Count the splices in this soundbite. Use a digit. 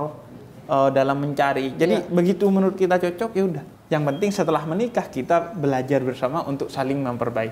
0